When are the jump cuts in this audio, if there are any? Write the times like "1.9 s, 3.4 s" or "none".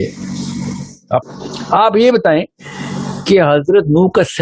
1.2 s